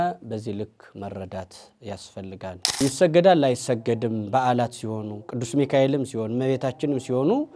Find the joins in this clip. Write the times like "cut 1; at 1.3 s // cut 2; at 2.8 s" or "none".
cut 1; at 2.8 s